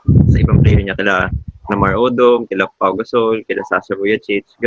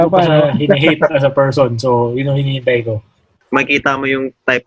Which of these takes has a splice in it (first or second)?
second